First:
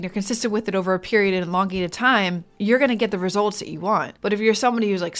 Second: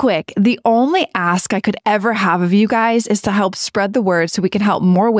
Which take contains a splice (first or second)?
first